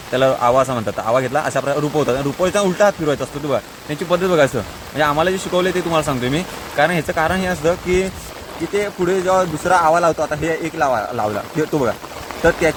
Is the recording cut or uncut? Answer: uncut